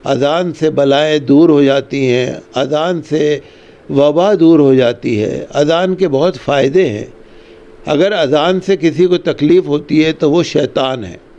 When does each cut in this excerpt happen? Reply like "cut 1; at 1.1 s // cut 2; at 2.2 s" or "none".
none